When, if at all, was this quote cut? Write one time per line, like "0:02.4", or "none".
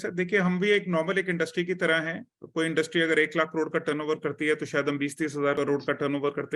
0:05.5